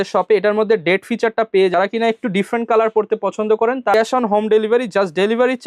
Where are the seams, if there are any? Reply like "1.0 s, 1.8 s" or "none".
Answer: 1.7 s, 3.9 s